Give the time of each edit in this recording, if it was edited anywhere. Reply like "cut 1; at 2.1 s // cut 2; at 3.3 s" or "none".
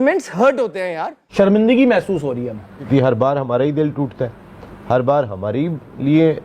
cut 1; at 1.3 s // cut 2; at 2.9 s

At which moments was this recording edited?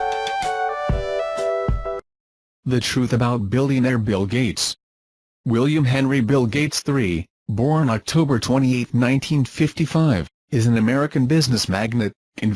none

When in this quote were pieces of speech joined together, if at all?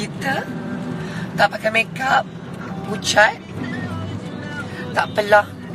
none

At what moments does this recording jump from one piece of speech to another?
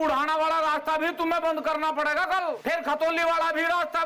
cut 1; at 2.6 s

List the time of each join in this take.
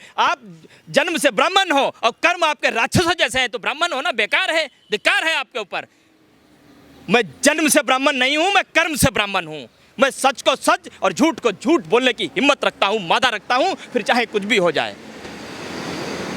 none

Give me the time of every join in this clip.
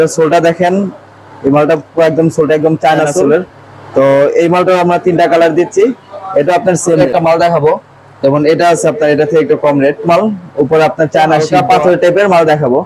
cut 1; at 3.2 s // cut 2; at 7.0 s // cut 3; at 10.1 s // cut 4; at 11.4 s

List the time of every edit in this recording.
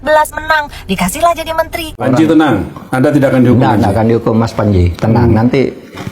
cut 1; at 1.8 s

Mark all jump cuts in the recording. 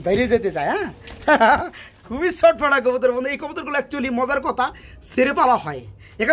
none

